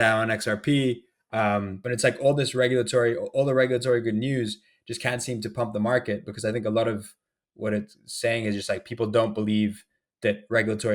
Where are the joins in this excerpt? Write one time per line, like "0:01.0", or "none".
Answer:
0:01.8